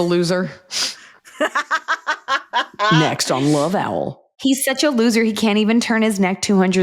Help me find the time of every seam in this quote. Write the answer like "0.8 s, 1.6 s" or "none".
4.4 s